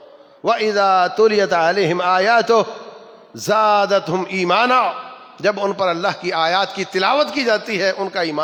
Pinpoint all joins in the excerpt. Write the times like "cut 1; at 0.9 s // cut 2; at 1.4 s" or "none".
none